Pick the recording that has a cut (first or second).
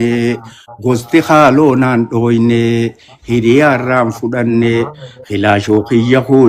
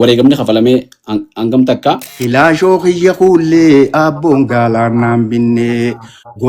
second